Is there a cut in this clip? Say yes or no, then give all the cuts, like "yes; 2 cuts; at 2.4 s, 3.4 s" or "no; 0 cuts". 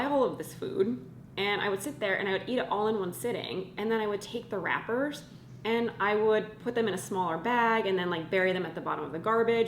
no; 0 cuts